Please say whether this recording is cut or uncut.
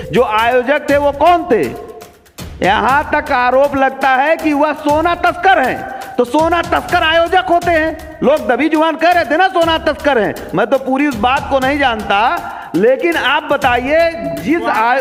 uncut